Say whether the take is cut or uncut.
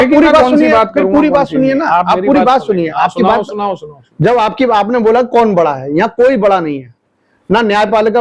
uncut